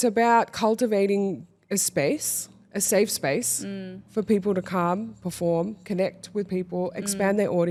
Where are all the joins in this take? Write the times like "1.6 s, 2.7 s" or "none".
none